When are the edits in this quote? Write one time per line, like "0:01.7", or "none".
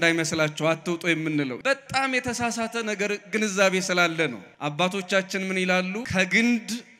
0:01.5
0:04.5
0:06.0